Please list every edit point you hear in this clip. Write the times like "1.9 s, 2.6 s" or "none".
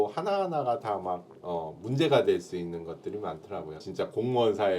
3.9 s